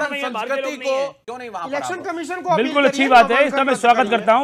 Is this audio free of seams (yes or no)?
no